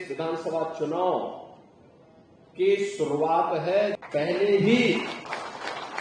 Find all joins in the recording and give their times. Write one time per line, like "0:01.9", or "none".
0:04.0